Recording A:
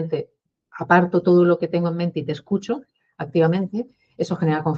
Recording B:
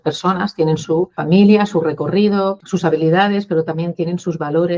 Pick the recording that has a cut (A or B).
B